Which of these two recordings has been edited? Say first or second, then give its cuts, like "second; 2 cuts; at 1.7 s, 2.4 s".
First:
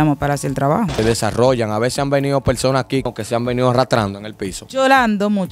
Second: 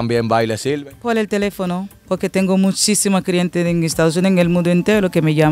first; 2 cuts; at 1.0 s, 3.1 s